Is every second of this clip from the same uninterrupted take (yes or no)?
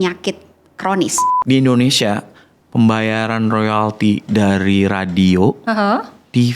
no